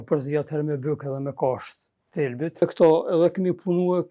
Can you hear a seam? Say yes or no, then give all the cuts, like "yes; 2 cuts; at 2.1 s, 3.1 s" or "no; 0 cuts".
yes; 1 cut; at 2.6 s